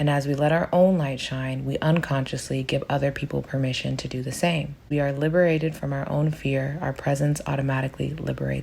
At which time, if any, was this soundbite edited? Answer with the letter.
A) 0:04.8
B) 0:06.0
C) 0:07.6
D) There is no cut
A